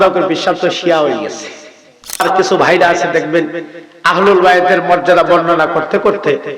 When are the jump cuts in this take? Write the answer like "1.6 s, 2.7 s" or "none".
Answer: 2.2 s